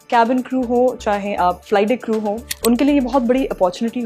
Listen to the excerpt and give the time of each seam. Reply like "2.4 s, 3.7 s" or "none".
1.6 s, 2.5 s